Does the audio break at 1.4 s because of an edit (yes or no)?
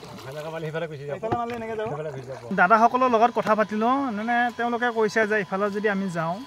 no